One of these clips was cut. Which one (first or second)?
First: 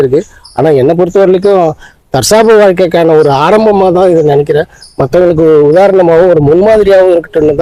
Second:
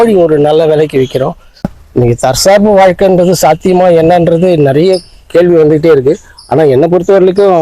second